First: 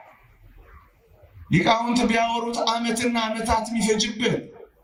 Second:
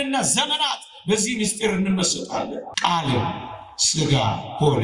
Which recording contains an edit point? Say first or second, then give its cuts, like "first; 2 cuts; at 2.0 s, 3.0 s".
second; 1 cut; at 2.7 s